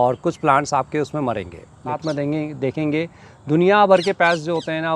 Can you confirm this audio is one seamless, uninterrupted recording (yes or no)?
no